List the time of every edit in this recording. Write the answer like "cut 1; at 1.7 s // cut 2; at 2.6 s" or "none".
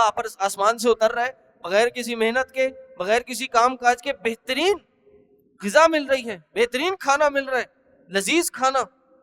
none